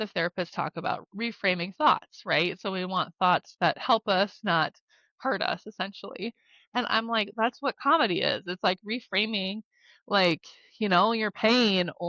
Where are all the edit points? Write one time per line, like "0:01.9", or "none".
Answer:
0:01.0